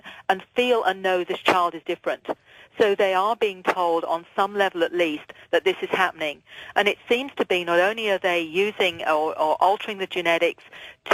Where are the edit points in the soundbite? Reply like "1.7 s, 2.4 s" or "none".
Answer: 8.7 s